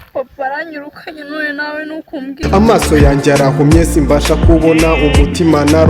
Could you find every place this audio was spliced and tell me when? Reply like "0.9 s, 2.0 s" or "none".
2.4 s